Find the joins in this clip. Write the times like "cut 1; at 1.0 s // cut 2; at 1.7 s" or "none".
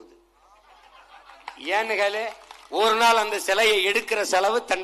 none